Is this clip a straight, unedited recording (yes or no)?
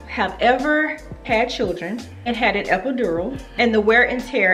no